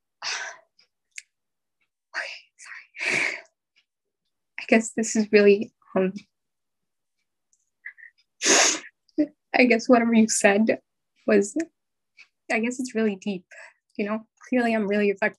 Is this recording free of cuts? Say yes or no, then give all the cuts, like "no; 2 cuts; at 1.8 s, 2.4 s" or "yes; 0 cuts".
no; 1 cut; at 14.3 s